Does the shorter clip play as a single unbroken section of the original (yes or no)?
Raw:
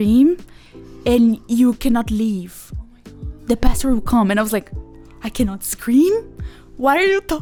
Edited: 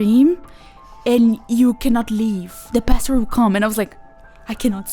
no